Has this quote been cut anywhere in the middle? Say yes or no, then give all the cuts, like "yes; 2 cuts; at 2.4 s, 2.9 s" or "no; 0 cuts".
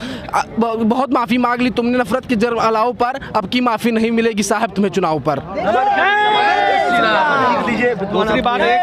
no; 0 cuts